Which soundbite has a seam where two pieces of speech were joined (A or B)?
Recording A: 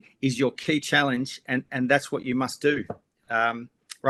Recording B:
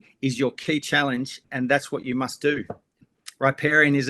B